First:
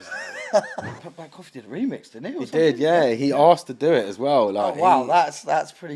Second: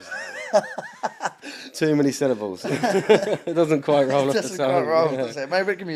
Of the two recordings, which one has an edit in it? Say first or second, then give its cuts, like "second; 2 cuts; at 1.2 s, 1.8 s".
first; 1 cut; at 1.0 s